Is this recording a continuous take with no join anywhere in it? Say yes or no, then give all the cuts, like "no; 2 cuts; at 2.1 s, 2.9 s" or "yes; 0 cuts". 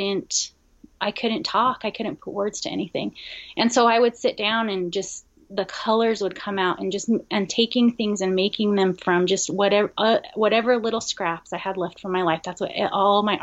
yes; 0 cuts